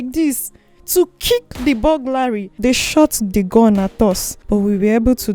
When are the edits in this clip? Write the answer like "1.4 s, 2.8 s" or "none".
2.5 s, 4.3 s